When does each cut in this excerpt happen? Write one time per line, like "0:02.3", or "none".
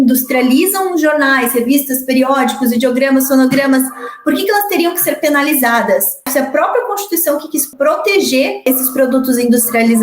0:06.2
0:07.7
0:08.7